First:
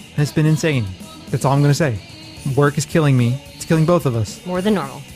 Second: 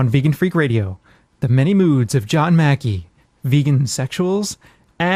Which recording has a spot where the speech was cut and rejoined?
first; 1 cut; at 2.0 s

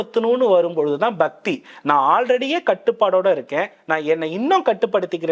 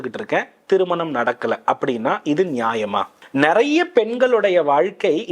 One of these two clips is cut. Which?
second; 1 cut; at 3.2 s

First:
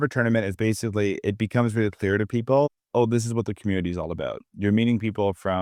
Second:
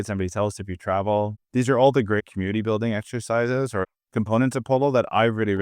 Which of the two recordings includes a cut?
second; 3 cuts; at 1.4 s, 2.2 s, 3.8 s

